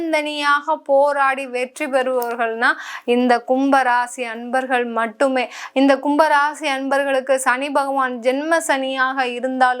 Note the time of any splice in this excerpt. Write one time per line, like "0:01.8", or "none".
none